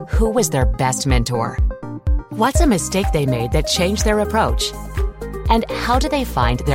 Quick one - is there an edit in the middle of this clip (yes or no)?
no